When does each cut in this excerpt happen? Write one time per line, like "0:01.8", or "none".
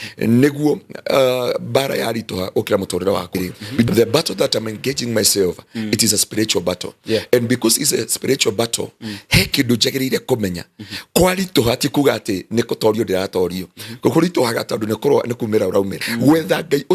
0:03.9
0:16.0